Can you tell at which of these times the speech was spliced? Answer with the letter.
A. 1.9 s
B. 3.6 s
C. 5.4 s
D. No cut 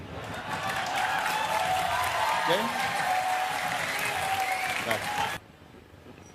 C